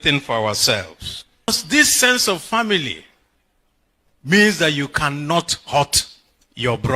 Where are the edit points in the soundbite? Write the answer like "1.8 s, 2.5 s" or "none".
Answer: 1.5 s

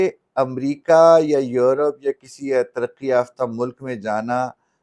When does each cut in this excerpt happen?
none

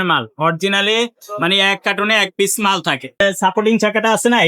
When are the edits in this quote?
3.2 s

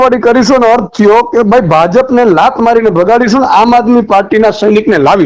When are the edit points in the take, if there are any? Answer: none

